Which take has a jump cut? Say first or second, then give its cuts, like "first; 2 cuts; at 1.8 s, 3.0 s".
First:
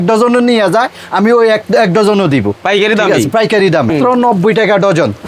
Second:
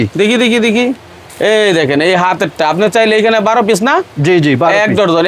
first; 1 cut; at 3.9 s